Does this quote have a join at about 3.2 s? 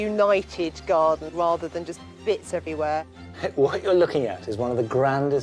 yes; 2 cuts; at 1.3 s, 3.2 s

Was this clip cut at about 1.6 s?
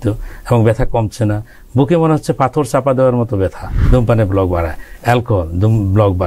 no; 1 cut; at 3.7 s

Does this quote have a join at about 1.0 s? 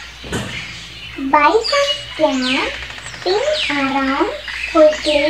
yes; 1 cut; at 1.0 s

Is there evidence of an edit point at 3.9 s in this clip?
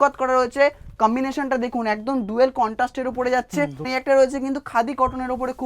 yes; 1 cut; at 3.9 s

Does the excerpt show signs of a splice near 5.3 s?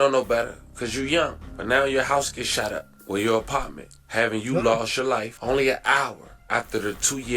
yes; 1 cut; at 5.3 s

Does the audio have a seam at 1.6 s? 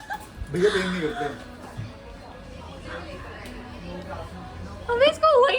no; 0 cuts

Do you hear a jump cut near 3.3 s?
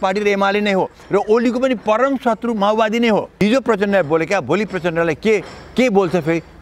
yes; 1 cut; at 3.3 s

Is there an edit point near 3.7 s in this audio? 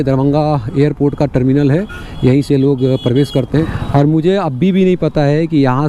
yes; 1 cut; at 3.7 s

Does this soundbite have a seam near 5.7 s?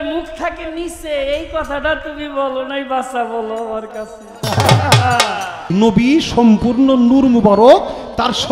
yes; 1 cut; at 5.7 s

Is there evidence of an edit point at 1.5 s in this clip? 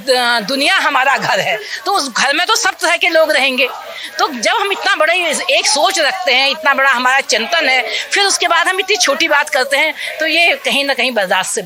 no; 0 cuts

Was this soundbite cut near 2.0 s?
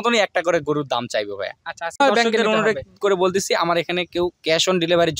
yes; 1 cut; at 2.0 s

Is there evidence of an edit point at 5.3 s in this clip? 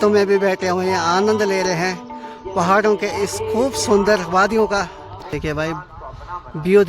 yes; 1 cut; at 5.3 s

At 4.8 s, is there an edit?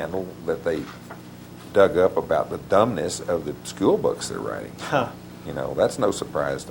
no; 0 cuts

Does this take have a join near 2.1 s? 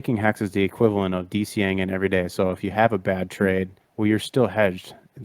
no; 1 cut; at 3.8 s

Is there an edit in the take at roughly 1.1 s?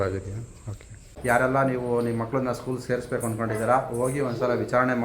yes; 1 cut; at 1.1 s

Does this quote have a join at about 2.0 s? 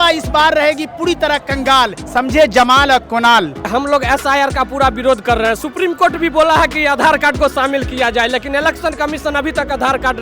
yes; 2 cuts; at 2.0 s, 3.7 s

